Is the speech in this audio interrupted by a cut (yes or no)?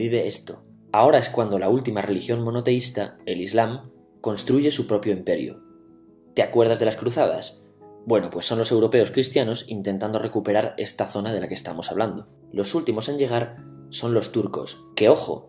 no